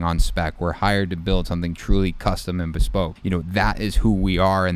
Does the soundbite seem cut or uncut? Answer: cut